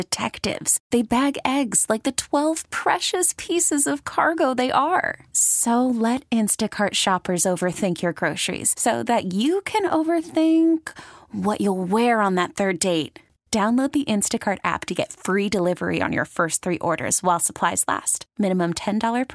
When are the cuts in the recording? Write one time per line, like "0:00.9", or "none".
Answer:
none